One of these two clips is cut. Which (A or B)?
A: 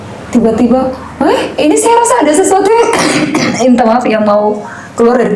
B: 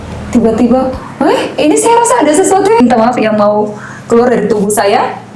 B